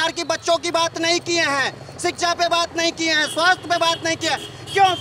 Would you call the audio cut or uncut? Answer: uncut